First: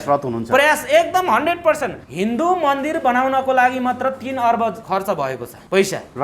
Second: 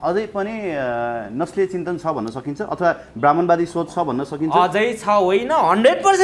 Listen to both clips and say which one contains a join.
first; 2 cuts; at 2.0 s, 5.2 s

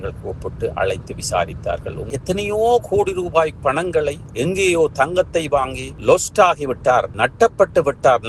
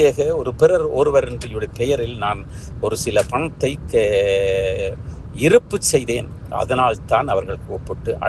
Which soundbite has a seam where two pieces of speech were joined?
first; 1 cut; at 2.1 s

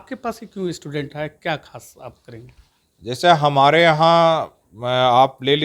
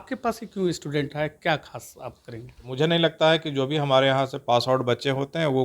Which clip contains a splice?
second; 1 cut; at 2.7 s

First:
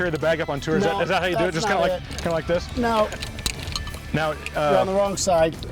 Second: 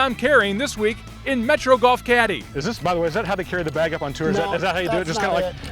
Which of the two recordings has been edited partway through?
second; 1 cut; at 2.4 s

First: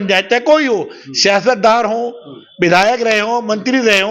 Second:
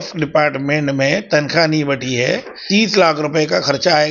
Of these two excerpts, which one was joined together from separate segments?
second; 1 cut; at 2.5 s

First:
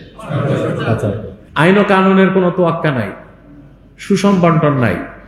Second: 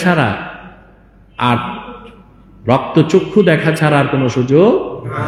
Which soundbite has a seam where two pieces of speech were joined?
first; 1 cut; at 1.4 s

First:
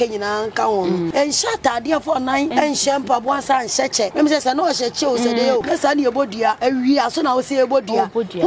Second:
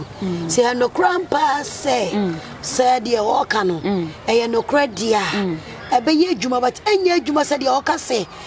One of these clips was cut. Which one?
first; 5 cuts; at 1.1 s, 2.5 s, 4.1 s, 5.6 s, 6.6 s

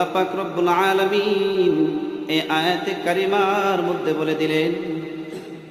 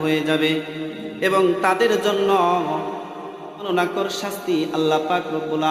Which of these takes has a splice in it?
second; 1 cut; at 3.7 s

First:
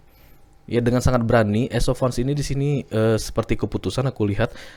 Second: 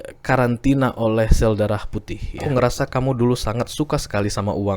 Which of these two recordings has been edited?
second; 1 cut; at 2.4 s

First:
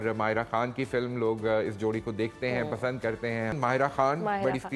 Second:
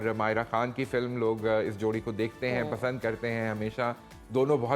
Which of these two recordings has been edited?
first; 1 cut; at 3.5 s

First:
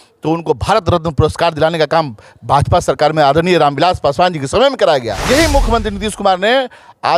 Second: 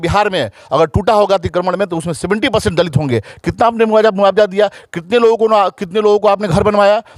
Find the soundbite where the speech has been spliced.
first; 1 cut; at 5.1 s

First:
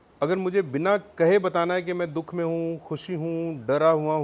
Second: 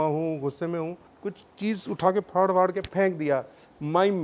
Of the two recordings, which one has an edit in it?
second; 1 cut; at 1.1 s

